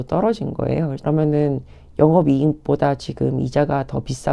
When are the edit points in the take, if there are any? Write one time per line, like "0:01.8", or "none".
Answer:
0:01.0